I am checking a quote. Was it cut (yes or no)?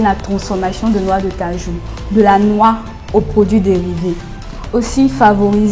no